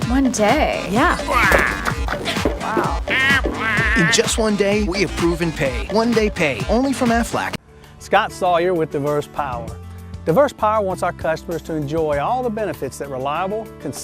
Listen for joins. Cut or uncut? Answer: cut